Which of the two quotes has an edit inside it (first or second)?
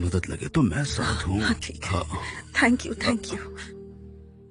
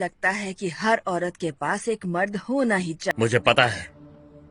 second